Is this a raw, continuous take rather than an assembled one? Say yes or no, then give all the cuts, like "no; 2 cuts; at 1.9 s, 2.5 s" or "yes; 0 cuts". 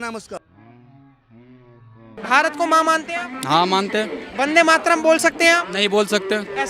no; 1 cut; at 2.1 s